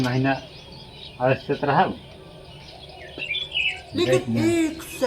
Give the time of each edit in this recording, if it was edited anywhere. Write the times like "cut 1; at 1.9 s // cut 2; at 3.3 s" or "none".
none